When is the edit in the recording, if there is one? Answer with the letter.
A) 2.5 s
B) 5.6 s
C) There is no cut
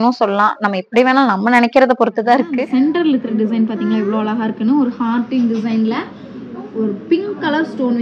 A